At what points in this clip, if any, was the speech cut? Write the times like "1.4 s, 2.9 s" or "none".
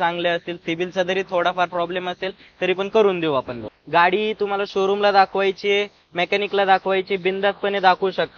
3.7 s